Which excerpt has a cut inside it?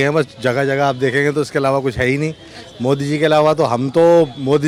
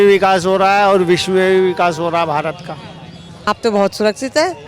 second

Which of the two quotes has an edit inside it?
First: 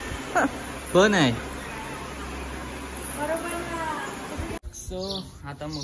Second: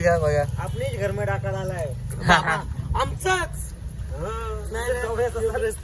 first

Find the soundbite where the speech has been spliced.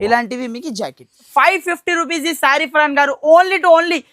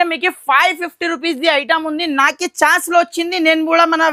first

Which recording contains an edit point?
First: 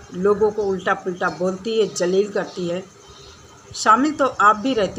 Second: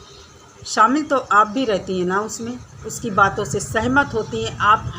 second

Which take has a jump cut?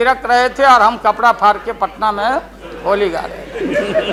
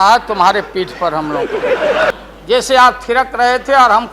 second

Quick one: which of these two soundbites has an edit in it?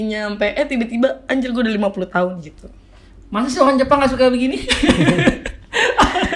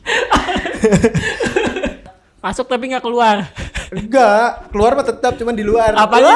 second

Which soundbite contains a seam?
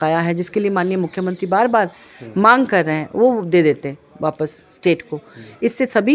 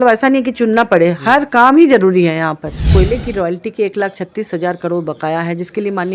second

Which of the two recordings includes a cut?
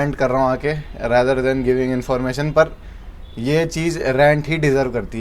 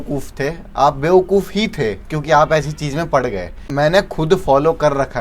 second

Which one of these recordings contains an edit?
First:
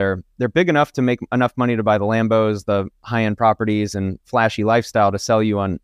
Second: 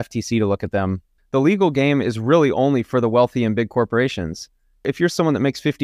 second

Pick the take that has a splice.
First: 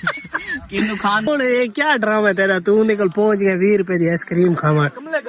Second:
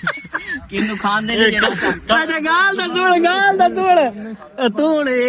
first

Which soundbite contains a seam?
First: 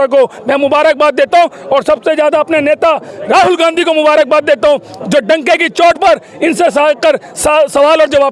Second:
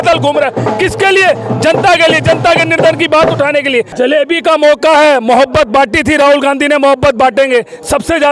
second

